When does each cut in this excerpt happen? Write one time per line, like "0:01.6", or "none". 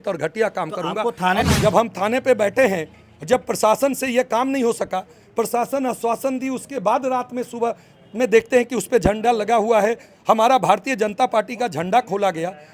0:01.5